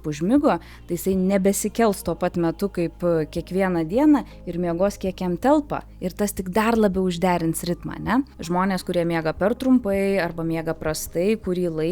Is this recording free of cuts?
no; 1 cut; at 8.4 s

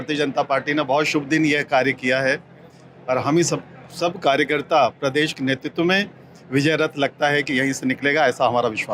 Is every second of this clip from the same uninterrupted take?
yes; 0 cuts

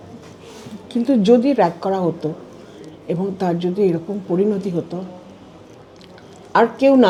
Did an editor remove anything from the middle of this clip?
no; 0 cuts

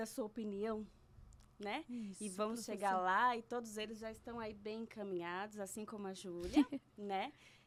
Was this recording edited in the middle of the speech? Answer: no; 0 cuts

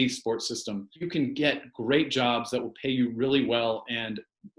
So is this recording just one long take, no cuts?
no; 1 cut; at 0.9 s

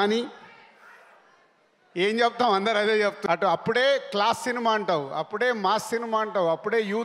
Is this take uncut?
no; 1 cut; at 3.2 s

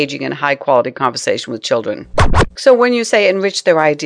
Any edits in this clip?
yes; 1 cut; at 2.3 s

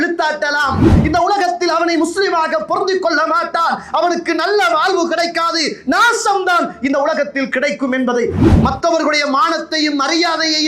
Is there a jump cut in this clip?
yes; 2 cuts; at 1.0 s, 8.4 s

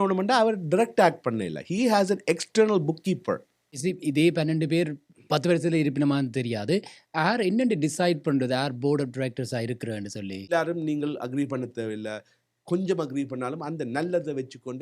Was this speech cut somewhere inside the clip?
yes; 2 cuts; at 3.8 s, 10.5 s

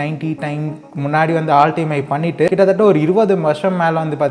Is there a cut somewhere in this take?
yes; 1 cut; at 2.5 s

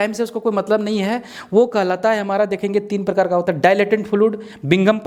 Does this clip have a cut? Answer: no; 0 cuts

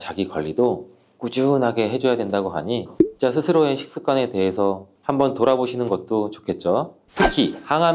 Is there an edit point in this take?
yes; 1 cut; at 7.0 s

